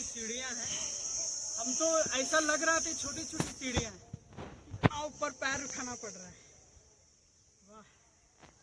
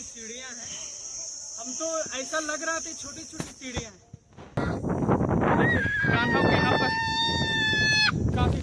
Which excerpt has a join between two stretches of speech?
second; 1 cut; at 4.6 s

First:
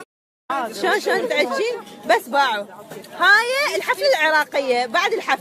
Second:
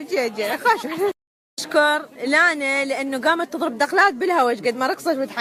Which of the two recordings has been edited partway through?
first; 1 cut; at 0.9 s

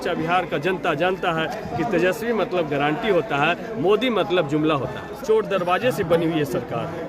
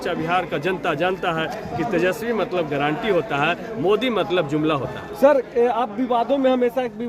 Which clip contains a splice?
first; 1 cut; at 5.0 s

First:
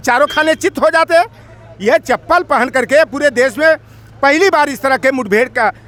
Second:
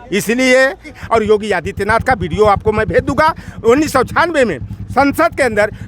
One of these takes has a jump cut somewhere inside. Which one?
second; 1 cut; at 1.0 s

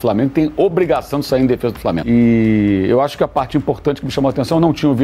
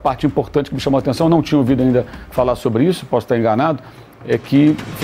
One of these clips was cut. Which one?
first; 1 cut; at 2.0 s

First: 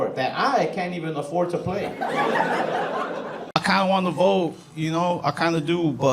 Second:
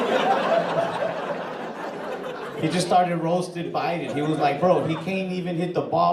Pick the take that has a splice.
first; 1 cut; at 3.5 s

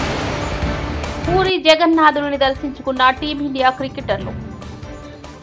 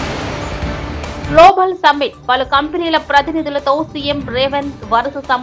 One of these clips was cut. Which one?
second; 1 cut; at 1.2 s

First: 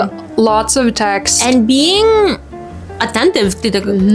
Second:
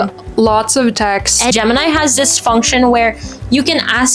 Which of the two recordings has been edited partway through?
second; 1 cut; at 1.5 s

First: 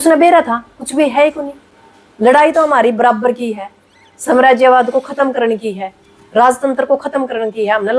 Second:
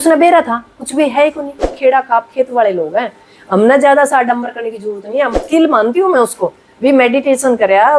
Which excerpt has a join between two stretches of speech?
second; 2 cuts; at 1.6 s, 5.4 s

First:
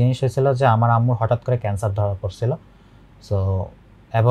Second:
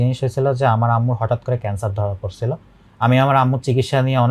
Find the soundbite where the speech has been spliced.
second; 1 cut; at 2.8 s

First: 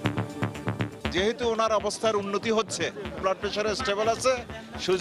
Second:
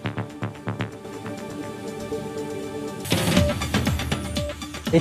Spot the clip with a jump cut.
first; 2 cuts; at 1.0 s, 3.2 s

